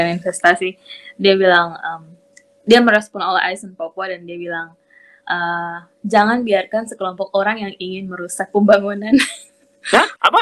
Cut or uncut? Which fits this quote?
uncut